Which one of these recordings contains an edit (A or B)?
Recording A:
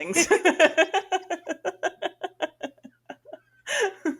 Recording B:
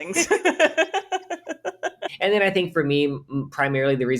B